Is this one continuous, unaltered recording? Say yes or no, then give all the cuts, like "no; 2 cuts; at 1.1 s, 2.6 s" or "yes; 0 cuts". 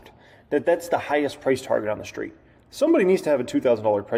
yes; 0 cuts